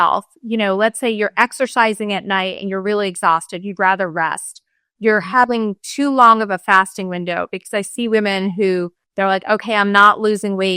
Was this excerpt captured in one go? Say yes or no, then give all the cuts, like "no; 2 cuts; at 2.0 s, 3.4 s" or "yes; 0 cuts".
no; 1 cut; at 9.0 s